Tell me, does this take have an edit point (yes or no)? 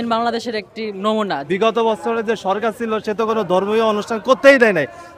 yes